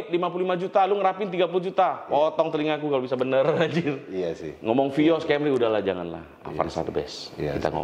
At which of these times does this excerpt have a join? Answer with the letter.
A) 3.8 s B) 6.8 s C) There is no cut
C